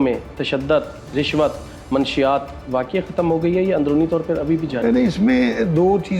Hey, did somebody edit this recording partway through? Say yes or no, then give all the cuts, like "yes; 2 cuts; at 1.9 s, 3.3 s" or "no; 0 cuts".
no; 0 cuts